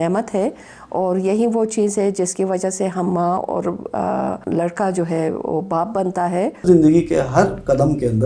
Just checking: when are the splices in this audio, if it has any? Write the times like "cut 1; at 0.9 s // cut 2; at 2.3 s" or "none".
cut 1; at 4.4 s // cut 2; at 6.6 s

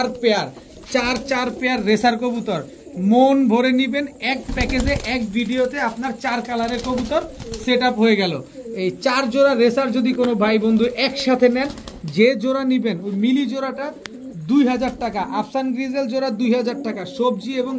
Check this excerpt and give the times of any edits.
none

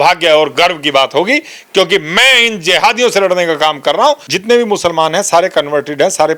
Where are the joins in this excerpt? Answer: cut 1; at 4.3 s

